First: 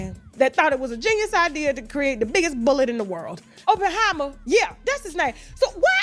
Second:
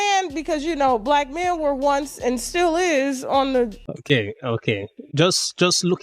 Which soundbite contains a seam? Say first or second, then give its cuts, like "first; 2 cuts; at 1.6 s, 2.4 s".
second; 1 cut; at 3.9 s